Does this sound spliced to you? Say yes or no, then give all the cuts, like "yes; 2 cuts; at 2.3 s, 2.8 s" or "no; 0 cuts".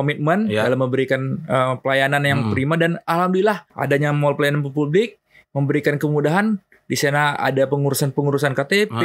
yes; 1 cut; at 3.7 s